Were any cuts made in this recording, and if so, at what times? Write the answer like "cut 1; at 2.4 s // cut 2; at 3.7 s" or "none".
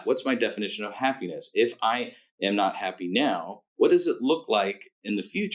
none